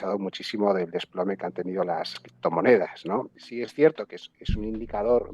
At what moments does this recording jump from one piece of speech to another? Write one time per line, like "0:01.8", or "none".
0:02.3
0:03.4